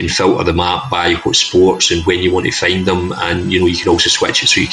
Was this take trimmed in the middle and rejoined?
no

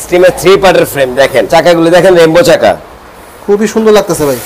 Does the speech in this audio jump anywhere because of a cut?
yes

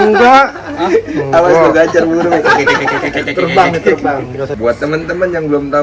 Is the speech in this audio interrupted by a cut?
yes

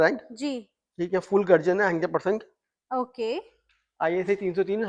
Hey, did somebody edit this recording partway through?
no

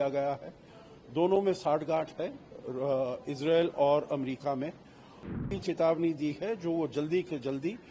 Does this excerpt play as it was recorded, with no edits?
no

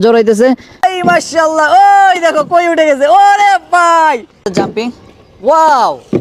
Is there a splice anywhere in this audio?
yes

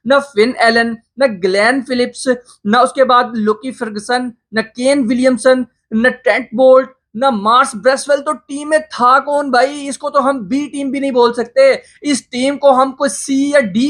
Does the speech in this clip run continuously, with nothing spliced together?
yes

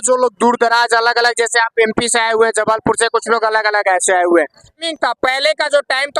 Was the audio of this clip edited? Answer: yes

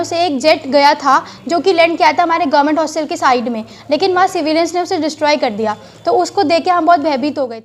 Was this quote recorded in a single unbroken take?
yes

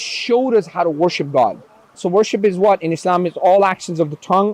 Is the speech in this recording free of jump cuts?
no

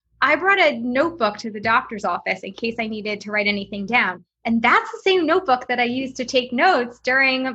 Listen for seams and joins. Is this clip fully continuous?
yes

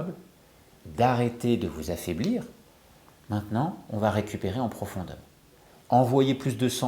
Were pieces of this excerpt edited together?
yes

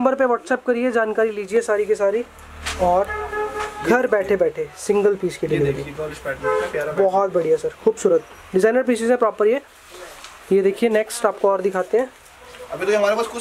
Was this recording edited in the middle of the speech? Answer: no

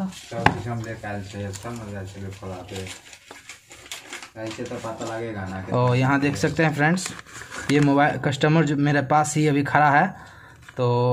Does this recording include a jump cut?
no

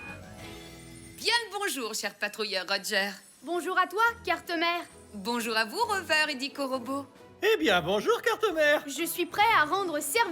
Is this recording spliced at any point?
yes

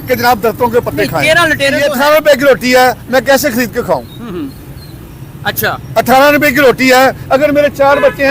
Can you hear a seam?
yes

